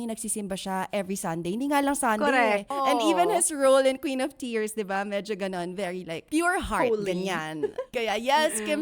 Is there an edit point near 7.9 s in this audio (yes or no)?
yes